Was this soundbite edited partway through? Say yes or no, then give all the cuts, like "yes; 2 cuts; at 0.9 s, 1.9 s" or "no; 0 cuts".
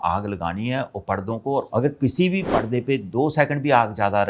yes; 2 cuts; at 1.7 s, 2.5 s